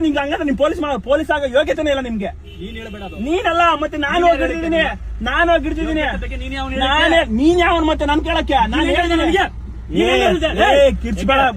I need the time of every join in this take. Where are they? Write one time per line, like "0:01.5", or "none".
none